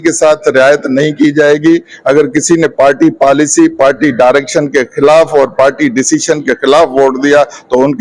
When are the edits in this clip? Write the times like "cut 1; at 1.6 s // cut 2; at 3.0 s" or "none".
none